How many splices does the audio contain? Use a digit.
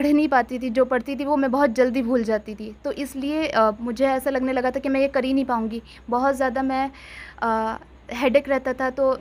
0